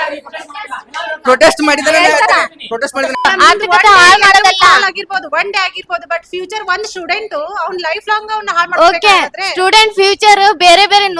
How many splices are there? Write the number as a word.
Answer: one